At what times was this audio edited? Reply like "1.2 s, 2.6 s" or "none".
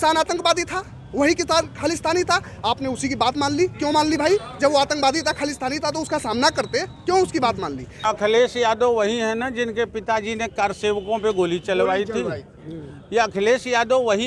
8.0 s

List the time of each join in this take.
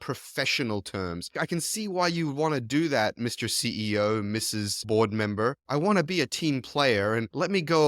1.2 s, 4.7 s

